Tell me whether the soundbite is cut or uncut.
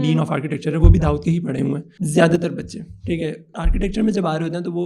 cut